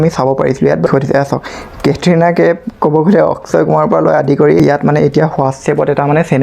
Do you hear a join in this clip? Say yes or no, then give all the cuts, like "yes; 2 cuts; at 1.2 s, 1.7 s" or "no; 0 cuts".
yes; 2 cuts; at 0.9 s, 4.6 s